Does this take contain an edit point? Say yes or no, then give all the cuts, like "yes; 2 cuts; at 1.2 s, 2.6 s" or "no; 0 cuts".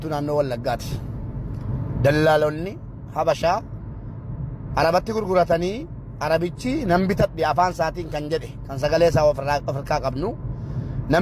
no; 0 cuts